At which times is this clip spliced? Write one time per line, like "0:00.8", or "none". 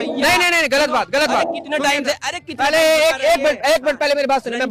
none